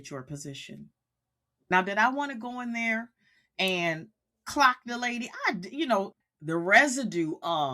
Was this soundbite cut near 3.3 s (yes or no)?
no